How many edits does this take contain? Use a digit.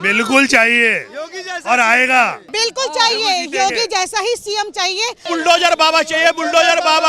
2